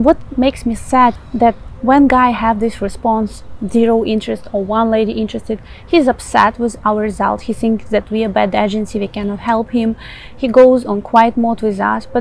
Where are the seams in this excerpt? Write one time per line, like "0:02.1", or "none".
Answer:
0:01.2